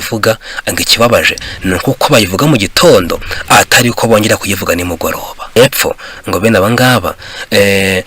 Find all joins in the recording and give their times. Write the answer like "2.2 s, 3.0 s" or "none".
5.6 s